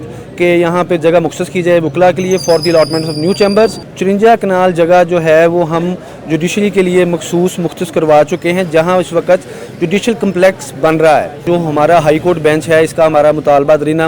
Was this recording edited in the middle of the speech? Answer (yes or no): yes